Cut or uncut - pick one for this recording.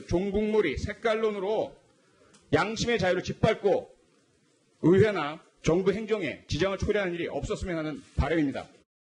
uncut